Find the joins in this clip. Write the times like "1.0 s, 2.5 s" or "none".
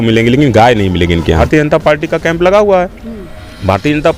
1.4 s